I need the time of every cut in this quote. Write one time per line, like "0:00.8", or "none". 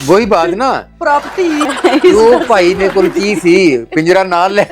0:01.6